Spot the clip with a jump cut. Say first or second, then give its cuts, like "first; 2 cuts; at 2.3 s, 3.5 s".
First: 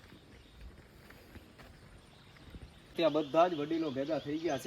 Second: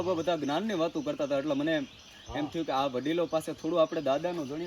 first; 1 cut; at 2.9 s